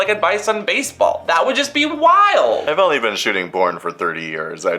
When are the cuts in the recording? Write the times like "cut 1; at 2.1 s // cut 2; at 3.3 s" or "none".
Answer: cut 1; at 2.6 s